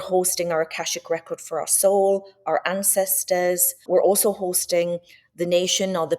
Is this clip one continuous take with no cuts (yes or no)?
no